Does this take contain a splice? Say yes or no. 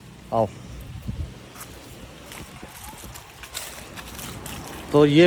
no